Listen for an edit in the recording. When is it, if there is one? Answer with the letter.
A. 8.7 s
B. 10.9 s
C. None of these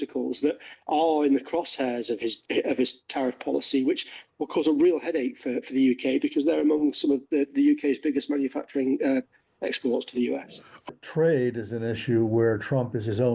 B